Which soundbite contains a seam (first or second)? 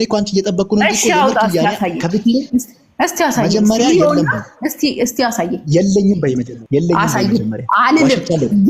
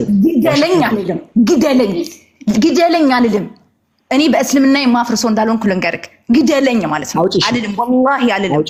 first